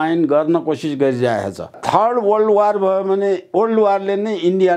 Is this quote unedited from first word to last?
no; 1 cut; at 1.8 s

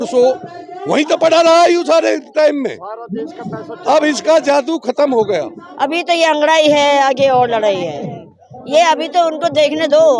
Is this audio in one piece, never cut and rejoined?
no; 1 cut; at 5.6 s

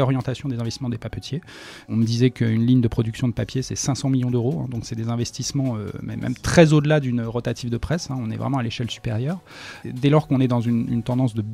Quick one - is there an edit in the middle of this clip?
yes; 2 cuts; at 1.9 s, 9.8 s

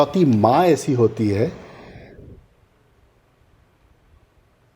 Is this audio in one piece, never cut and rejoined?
yes; 0 cuts

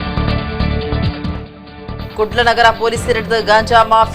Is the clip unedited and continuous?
no; 1 cut; at 1.4 s

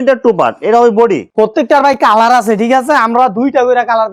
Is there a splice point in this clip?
no; 0 cuts

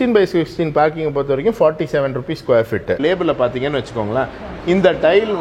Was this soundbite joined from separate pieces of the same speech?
yes; 1 cut; at 3.0 s

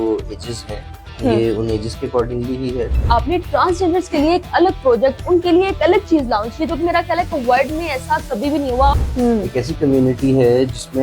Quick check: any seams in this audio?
yes; 2 cuts; at 3.0 s, 8.9 s

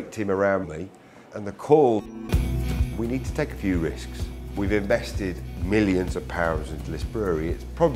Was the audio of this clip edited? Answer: no; 0 cuts

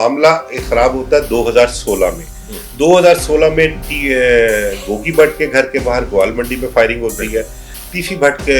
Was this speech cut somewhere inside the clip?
no; 0 cuts

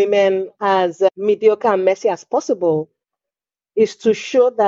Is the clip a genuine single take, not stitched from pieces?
no; 1 cut; at 1.1 s

